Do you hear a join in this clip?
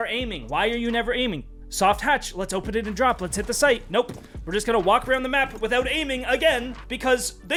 no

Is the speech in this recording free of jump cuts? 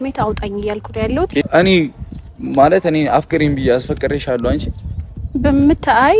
no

